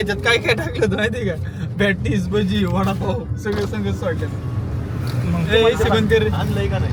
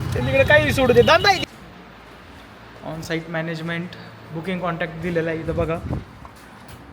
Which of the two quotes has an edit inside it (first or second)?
second